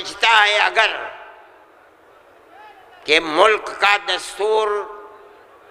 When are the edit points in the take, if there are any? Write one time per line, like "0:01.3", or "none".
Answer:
none